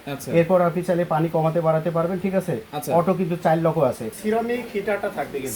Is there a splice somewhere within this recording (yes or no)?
yes